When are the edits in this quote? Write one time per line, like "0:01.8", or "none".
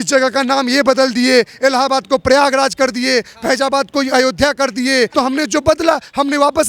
0:05.1